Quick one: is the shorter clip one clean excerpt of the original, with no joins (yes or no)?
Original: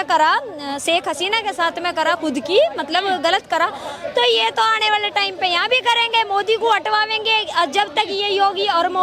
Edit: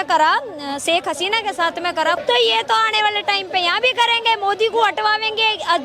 no